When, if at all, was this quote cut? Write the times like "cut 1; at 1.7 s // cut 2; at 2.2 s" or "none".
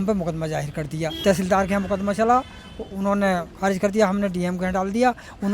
cut 1; at 1.1 s